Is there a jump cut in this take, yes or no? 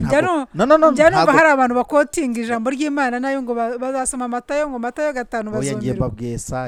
no